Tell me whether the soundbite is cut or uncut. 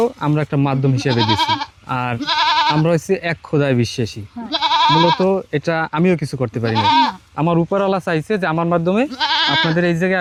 uncut